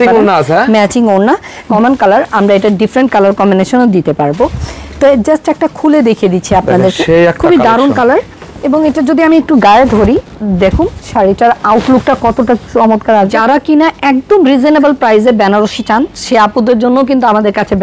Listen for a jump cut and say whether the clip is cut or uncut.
cut